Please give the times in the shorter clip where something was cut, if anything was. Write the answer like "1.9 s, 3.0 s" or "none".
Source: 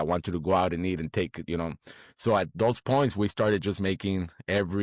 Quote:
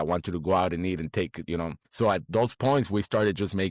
1.8 s